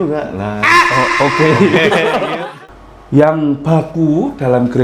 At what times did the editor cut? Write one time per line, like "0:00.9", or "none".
0:02.4